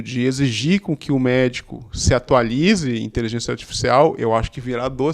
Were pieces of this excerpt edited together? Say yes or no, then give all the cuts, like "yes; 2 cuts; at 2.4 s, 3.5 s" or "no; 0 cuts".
no; 0 cuts